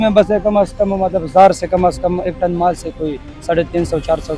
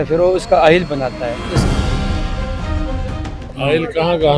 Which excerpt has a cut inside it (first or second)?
second